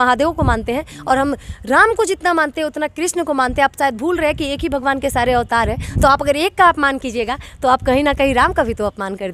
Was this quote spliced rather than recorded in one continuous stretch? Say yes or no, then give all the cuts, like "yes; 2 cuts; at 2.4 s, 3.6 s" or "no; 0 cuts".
no; 0 cuts